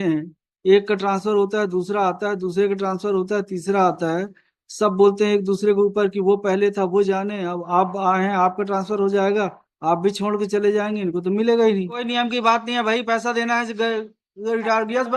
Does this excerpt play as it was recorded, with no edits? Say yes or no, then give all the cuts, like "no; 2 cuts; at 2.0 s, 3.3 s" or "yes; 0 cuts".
no; 1 cut; at 12.0 s